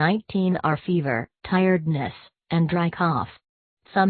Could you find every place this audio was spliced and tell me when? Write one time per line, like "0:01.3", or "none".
0:02.6